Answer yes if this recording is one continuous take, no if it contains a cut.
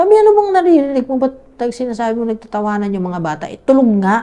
yes